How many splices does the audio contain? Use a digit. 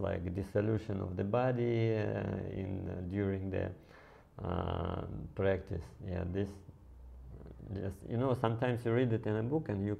0